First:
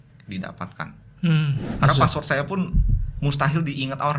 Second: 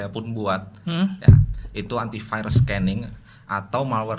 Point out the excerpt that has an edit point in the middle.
first; 1 cut; at 1.7 s

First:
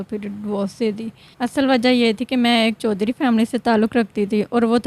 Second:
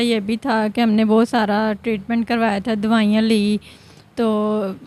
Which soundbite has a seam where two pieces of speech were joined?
first; 1 cut; at 1.2 s

